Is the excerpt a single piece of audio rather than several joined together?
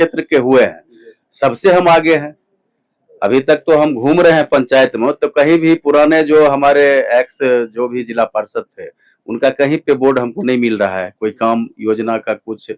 yes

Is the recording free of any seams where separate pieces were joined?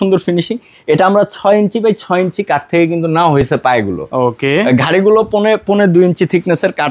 yes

